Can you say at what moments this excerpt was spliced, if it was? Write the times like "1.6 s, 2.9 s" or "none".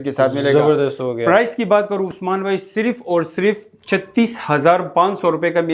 none